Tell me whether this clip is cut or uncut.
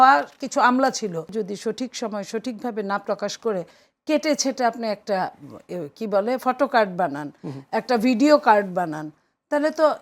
cut